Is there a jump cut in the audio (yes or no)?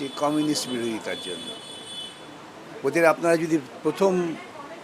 no